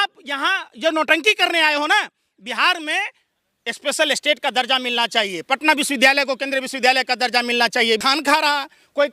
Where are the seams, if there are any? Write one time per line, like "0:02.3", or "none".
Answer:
0:08.0